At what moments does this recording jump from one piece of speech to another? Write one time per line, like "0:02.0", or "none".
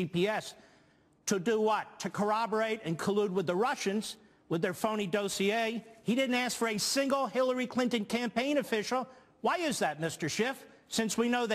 none